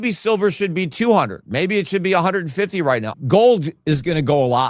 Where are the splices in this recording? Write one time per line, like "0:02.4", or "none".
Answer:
0:03.1